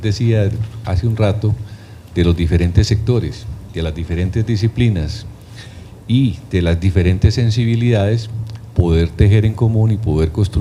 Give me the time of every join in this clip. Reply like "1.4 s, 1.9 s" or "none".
6.3 s